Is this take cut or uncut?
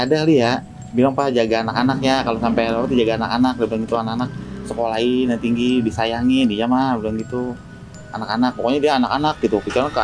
uncut